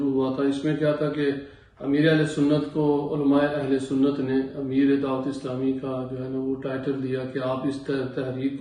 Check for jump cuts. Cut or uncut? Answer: uncut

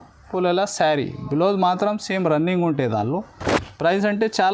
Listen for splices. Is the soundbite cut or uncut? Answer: uncut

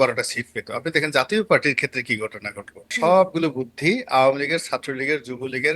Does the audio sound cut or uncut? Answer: cut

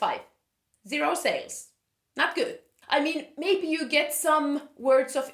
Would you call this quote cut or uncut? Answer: cut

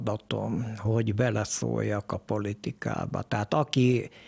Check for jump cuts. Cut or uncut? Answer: uncut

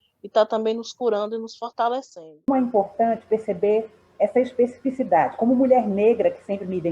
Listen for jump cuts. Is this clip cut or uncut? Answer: cut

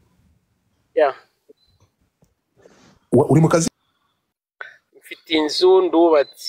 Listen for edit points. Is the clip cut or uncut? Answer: cut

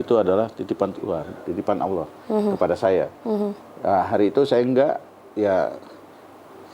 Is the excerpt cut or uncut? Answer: uncut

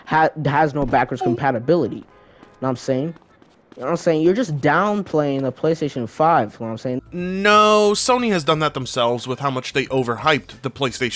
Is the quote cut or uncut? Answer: uncut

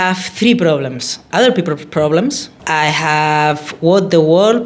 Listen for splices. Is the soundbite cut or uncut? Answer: cut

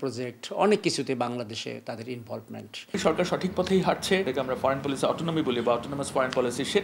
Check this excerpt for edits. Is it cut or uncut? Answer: cut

